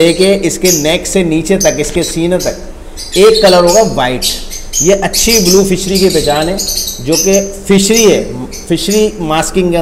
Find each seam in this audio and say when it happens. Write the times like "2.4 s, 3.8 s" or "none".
none

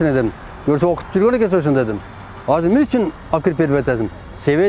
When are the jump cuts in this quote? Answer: none

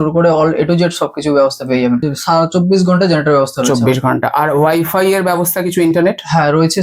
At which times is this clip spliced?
2.0 s

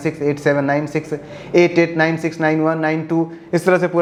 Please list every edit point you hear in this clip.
none

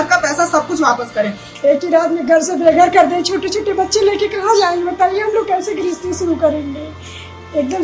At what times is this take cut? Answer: 1.4 s

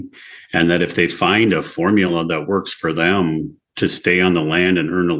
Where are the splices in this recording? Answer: none

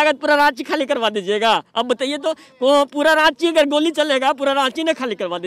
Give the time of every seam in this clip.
none

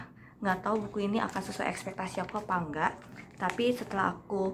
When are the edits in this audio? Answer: none

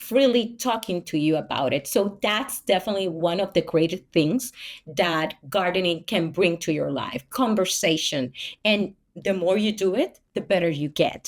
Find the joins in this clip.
none

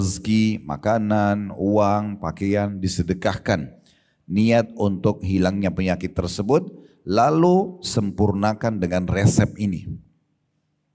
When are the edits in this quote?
none

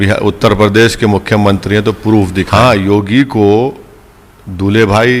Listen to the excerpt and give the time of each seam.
2.5 s

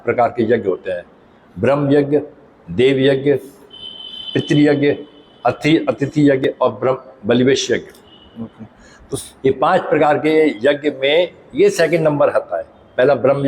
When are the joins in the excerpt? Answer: none

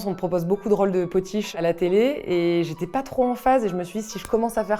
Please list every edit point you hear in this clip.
1.5 s

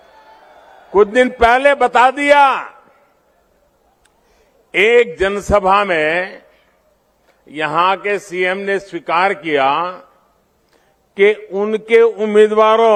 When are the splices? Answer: none

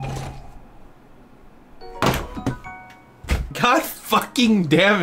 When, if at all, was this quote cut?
3.5 s

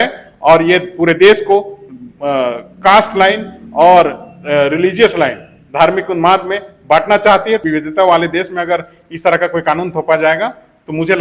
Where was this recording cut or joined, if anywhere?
7.6 s

